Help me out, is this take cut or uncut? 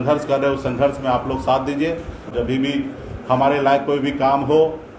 cut